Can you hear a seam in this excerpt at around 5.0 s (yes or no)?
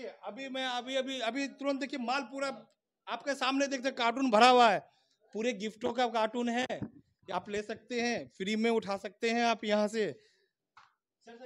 no